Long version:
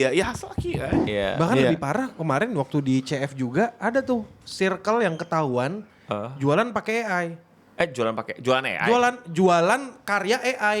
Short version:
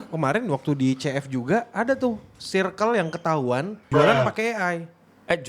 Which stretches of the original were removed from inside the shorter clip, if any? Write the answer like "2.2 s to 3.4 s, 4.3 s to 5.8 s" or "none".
5.9 s to 6.3 s